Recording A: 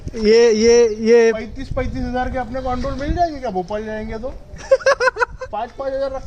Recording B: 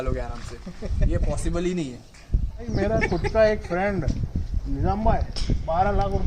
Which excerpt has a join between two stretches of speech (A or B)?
B